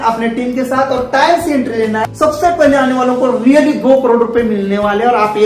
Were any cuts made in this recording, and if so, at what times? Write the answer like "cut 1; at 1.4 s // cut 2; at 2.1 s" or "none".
cut 1; at 2.1 s

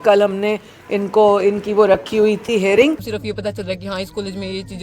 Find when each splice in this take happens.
cut 1; at 3.2 s

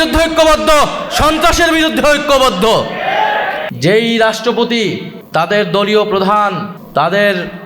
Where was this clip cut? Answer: cut 1; at 3.6 s // cut 2; at 5.1 s // cut 3; at 6.7 s

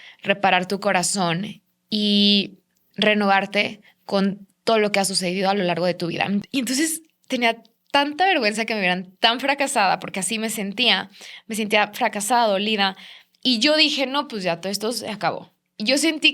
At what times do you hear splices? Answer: cut 1; at 6.4 s

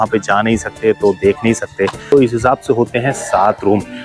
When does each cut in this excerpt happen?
cut 1; at 2.1 s

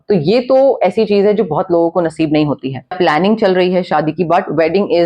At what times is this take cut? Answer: cut 1; at 2.9 s

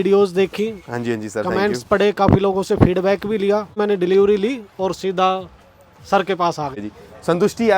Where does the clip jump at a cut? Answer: cut 1; at 3.8 s // cut 2; at 6.8 s

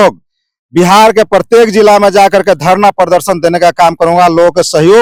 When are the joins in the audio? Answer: none

